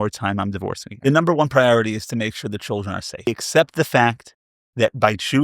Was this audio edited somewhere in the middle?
yes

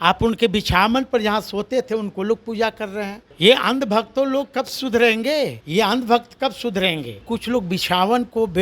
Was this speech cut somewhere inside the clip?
yes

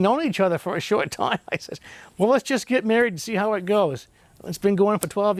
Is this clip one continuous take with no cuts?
yes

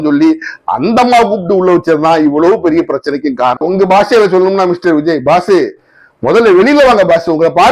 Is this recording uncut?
no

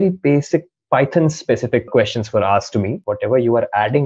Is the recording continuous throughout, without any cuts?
no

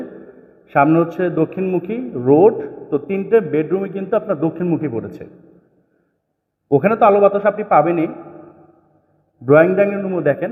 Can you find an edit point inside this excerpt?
no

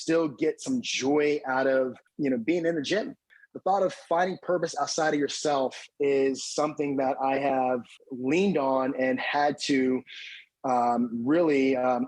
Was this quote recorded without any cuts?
no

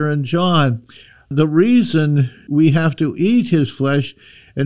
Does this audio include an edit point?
yes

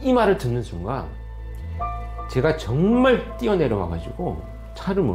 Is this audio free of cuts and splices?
yes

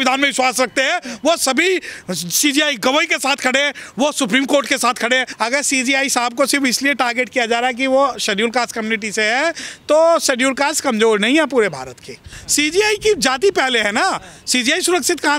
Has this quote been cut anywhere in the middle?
yes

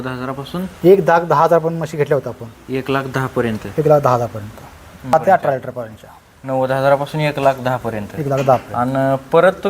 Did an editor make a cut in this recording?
yes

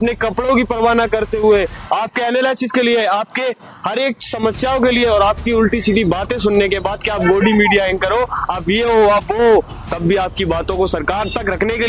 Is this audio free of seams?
yes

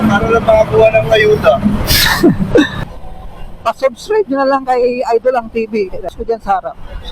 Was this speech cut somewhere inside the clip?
yes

